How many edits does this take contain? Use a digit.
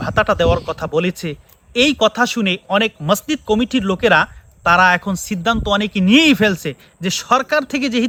0